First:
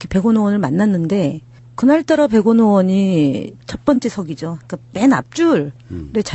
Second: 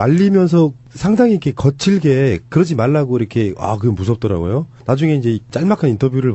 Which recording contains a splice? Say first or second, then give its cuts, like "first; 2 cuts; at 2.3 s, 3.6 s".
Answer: second; 1 cut; at 5.2 s